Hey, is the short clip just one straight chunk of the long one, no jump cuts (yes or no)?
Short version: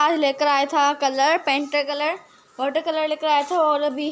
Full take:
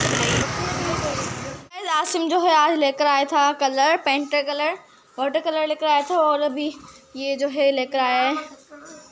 yes